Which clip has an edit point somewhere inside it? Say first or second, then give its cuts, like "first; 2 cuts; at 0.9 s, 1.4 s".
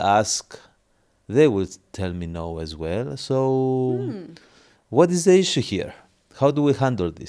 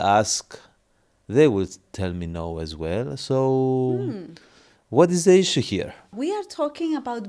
second; 1 cut; at 6.2 s